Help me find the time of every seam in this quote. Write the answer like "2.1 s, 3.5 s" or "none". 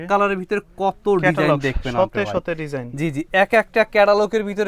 none